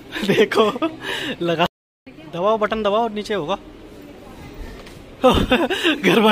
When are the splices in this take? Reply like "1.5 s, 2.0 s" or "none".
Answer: 1.7 s